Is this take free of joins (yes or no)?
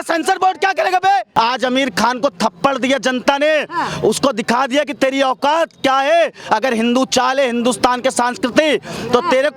no